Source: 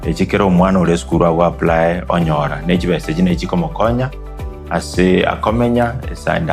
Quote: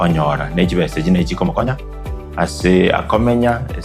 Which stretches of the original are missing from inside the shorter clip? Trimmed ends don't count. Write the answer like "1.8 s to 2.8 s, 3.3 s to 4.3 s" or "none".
3.8 s to 4.0 s